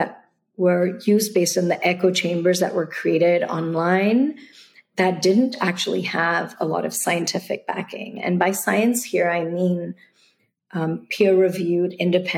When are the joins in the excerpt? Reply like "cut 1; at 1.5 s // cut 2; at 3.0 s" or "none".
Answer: none